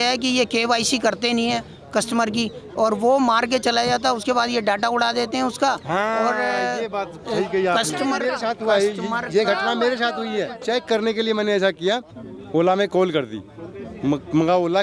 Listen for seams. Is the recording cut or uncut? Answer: cut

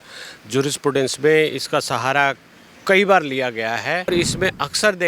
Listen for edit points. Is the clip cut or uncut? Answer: cut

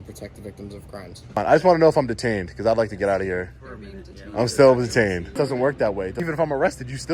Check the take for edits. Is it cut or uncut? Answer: cut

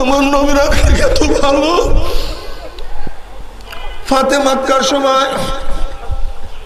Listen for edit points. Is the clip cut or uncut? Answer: uncut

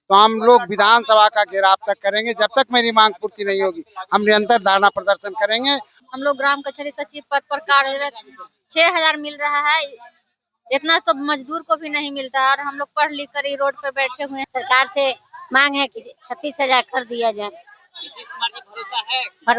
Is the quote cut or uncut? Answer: cut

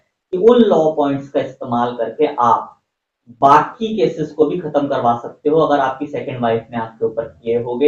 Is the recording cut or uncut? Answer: uncut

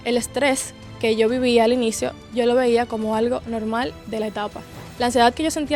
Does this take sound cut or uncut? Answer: uncut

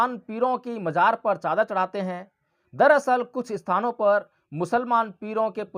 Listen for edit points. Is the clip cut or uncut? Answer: uncut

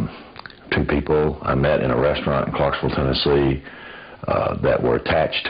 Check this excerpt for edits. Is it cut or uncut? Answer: uncut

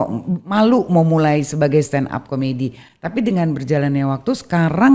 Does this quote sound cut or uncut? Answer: uncut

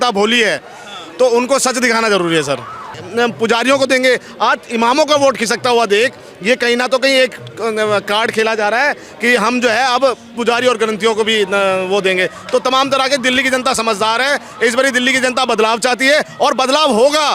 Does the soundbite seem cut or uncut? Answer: cut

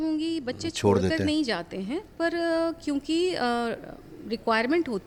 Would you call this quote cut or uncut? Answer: uncut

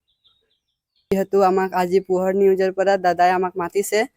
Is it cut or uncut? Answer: cut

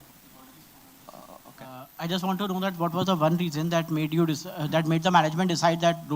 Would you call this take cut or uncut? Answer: cut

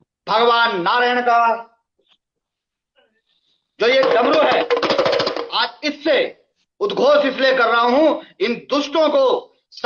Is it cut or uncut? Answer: uncut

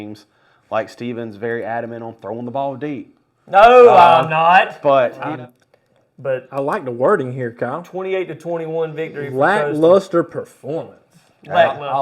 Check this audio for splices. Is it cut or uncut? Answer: cut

